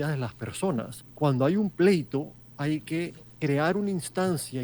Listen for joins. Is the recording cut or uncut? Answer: cut